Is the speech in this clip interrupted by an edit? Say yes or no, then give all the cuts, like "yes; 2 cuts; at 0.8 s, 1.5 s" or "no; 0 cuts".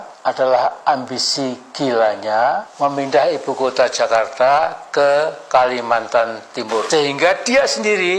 yes; 1 cut; at 6.9 s